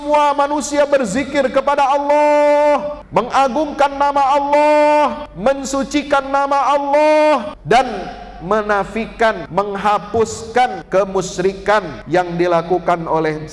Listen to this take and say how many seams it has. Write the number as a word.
six